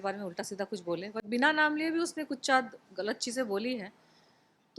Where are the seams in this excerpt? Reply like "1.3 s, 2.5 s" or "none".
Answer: none